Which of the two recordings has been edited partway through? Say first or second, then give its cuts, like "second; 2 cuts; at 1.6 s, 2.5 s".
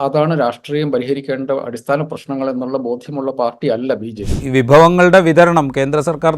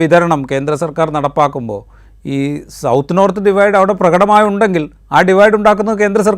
first; 1 cut; at 4.3 s